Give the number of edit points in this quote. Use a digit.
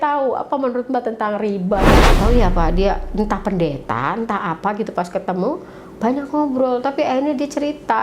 1